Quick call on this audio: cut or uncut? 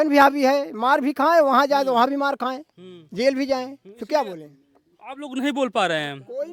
uncut